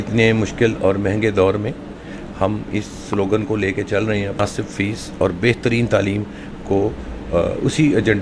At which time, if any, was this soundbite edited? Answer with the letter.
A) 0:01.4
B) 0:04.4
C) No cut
B